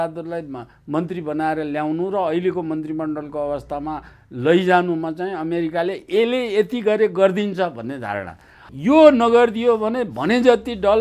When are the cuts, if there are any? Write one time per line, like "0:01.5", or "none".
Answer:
0:08.6